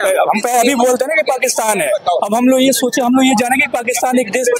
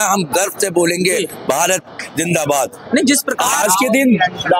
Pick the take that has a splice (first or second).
second